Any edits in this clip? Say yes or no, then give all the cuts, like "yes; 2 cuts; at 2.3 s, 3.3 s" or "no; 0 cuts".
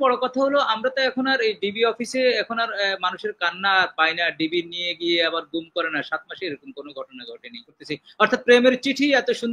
yes; 1 cut; at 7.8 s